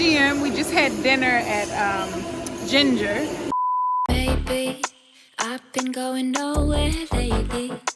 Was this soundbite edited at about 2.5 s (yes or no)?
no